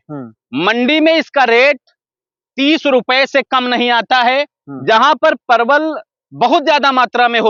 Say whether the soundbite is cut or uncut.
uncut